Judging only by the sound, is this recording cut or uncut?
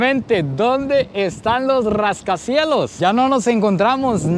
uncut